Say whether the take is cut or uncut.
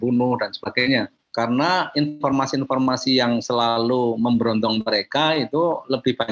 cut